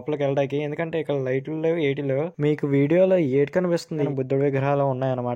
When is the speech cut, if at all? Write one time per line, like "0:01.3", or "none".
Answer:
0:04.1

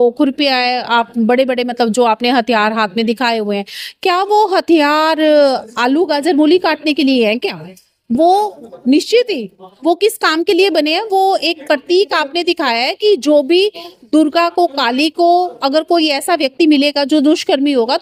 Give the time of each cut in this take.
none

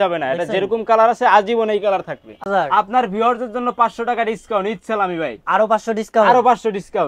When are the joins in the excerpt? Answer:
0:02.4

